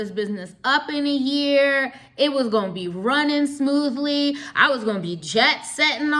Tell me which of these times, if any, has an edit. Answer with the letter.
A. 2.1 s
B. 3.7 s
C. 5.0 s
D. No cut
D